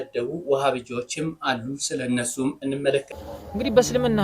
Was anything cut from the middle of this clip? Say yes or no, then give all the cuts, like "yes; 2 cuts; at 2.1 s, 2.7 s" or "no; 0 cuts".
yes; 1 cut; at 3.2 s